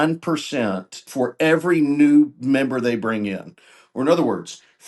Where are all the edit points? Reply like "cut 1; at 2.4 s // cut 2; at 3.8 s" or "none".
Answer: cut 1; at 1.1 s